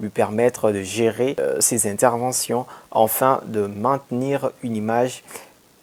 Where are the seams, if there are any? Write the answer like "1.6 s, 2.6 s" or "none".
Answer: 1.4 s